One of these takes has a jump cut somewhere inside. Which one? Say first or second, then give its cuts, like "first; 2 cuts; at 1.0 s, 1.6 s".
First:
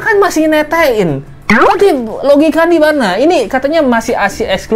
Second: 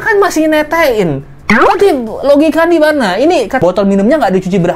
second; 1 cut; at 3.6 s